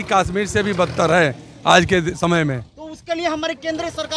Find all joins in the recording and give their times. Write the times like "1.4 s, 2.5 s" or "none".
none